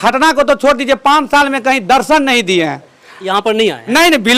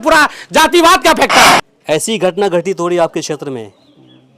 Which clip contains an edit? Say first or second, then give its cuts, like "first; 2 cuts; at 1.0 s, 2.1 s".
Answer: second; 1 cut; at 1.5 s